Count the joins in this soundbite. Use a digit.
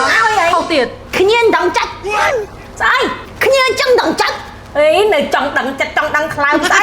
1